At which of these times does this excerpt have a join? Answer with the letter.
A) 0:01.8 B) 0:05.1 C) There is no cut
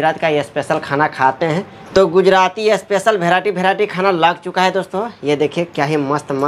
A